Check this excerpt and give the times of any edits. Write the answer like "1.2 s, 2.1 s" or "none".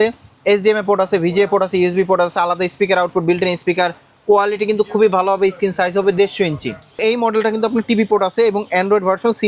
7.0 s